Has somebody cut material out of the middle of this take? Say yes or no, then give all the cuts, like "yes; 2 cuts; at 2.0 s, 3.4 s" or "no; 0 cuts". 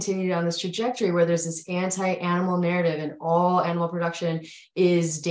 no; 0 cuts